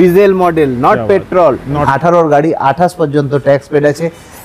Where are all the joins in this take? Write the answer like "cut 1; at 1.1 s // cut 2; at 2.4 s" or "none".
cut 1; at 1.8 s